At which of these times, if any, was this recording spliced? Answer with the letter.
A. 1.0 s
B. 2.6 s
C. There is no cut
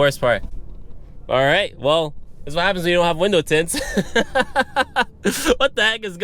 C